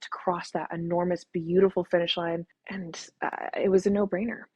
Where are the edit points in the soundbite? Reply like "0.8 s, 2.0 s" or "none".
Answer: none